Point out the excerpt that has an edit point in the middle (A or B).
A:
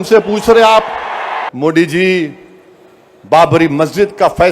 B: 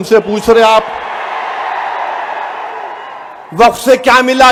A